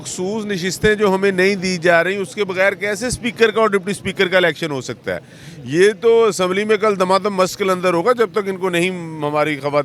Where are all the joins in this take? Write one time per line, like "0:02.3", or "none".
none